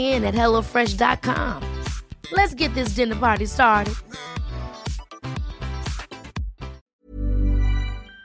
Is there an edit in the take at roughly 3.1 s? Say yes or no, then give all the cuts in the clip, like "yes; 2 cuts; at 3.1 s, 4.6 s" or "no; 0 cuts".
no; 1 cut; at 6.8 s